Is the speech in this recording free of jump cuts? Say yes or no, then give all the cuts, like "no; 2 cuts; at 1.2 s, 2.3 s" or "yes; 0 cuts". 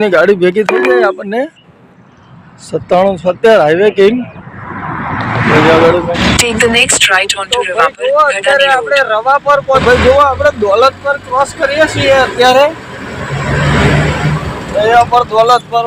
no; 2 cuts; at 6.1 s, 9.8 s